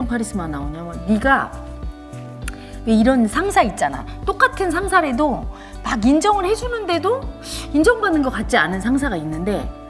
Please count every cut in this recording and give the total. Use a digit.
0